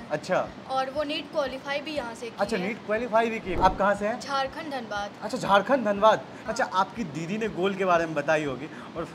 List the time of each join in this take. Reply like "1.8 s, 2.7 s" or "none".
3.6 s, 6.3 s